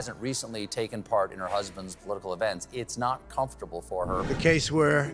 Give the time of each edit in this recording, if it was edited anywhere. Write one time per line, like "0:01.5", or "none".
0:04.2